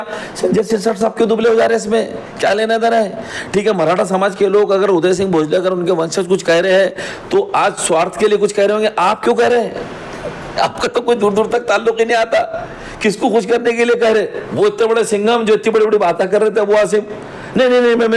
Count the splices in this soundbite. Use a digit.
1